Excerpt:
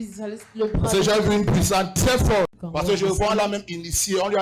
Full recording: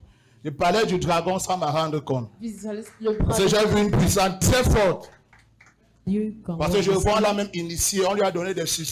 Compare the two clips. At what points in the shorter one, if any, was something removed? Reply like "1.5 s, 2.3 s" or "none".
2.6 s